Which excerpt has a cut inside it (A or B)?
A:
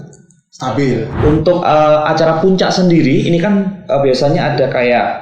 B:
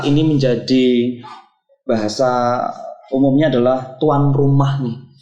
A